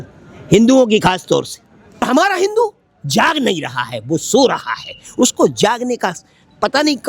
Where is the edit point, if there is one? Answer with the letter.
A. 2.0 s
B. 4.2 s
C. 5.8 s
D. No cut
A